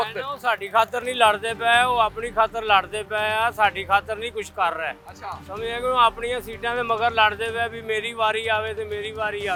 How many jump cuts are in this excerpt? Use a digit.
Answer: 0